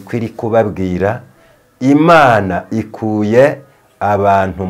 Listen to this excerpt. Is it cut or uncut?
uncut